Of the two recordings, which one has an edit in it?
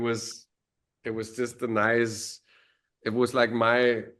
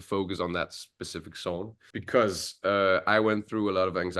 second; 1 cut; at 1.8 s

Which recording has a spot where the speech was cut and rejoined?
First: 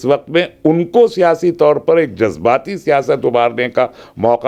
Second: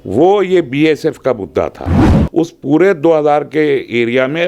second; 1 cut; at 2.2 s

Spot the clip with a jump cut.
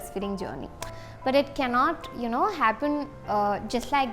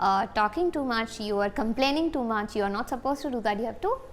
first; 1 cut; at 1.0 s

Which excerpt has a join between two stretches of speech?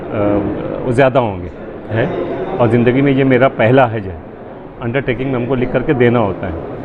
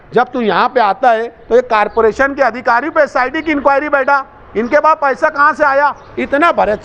first; 1 cut; at 1.9 s

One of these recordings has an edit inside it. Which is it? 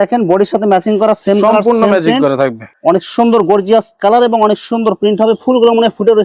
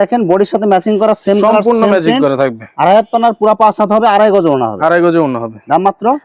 first; 1 cut; at 2.7 s

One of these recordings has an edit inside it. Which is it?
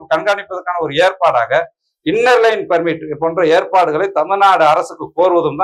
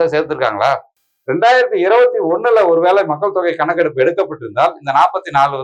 second; 1 cut; at 1.0 s

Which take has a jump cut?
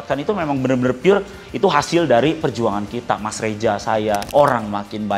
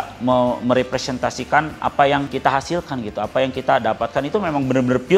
first; 1 cut; at 4.2 s

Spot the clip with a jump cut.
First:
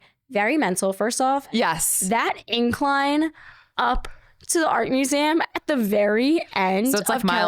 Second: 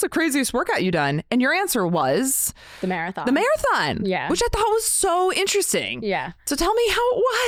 first; 1 cut; at 1.8 s

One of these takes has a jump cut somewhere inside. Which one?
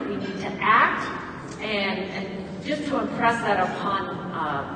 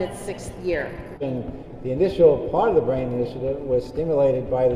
second; 1 cut; at 1.2 s

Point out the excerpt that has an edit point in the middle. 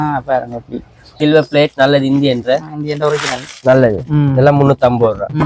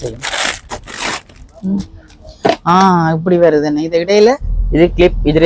first; 1 cut; at 1.1 s

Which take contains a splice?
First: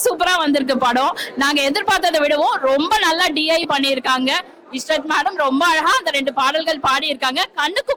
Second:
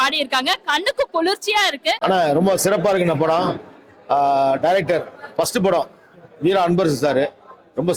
second; 1 cut; at 2.0 s

